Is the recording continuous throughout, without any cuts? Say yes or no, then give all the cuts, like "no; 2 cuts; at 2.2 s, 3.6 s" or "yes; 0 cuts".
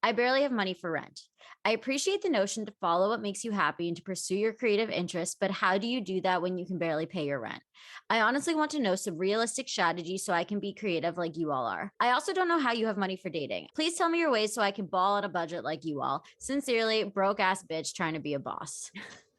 no; 2 cuts; at 11.8 s, 13.6 s